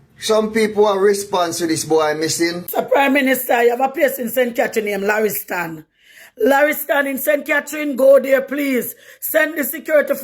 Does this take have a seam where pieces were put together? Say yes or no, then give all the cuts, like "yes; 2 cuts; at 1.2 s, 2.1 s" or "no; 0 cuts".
yes; 1 cut; at 2.6 s